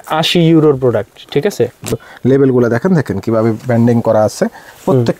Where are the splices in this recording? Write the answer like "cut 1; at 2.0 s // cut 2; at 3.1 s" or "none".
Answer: cut 1; at 2.1 s